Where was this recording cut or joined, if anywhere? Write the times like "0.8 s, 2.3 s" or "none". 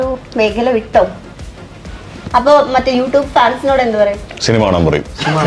2.1 s, 4.3 s

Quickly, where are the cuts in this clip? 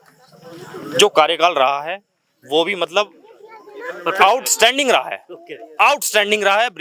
none

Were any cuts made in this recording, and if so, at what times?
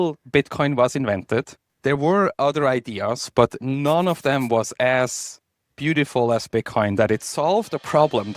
1.6 s

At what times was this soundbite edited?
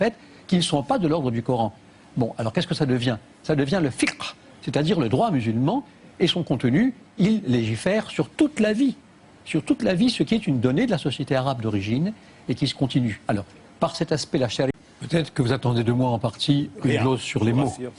none

